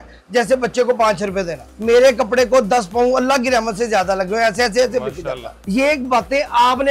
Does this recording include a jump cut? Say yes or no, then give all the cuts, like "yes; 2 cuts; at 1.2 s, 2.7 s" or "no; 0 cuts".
yes; 2 cuts; at 1.9 s, 5.6 s